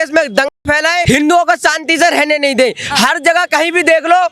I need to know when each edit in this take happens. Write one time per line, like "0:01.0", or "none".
0:01.0